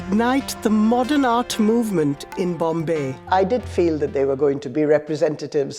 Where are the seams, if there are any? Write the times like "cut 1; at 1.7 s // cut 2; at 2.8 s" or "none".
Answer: cut 1; at 3.1 s // cut 2; at 4.7 s